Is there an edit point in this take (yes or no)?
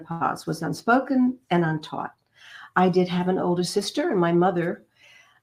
no